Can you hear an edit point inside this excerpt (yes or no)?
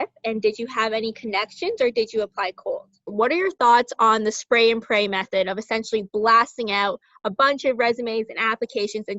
yes